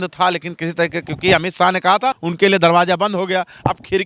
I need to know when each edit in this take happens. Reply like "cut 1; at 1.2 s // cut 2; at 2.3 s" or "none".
cut 1; at 2.2 s